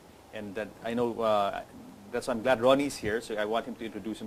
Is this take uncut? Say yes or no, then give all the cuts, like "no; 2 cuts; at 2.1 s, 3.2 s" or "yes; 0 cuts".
yes; 0 cuts